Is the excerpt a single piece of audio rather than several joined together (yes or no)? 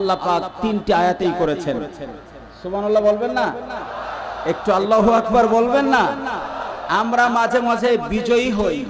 yes